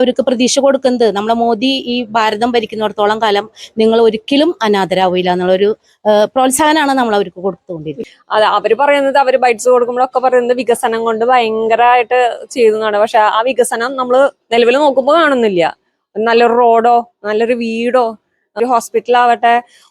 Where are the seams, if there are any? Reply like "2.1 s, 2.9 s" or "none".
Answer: 7.9 s, 18.6 s